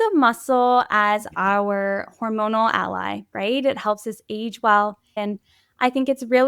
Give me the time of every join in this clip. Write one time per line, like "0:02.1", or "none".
0:05.1